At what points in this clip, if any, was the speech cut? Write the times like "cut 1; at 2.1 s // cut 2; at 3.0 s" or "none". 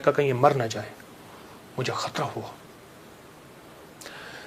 none